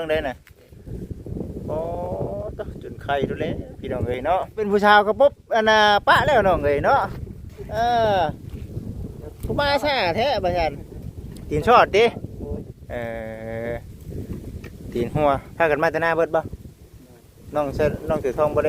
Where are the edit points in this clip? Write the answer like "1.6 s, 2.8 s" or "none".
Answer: 4.7 s